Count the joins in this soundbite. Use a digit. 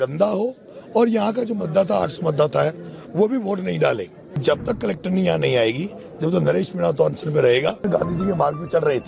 2